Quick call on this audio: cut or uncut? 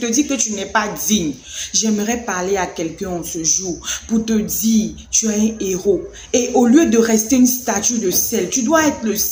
uncut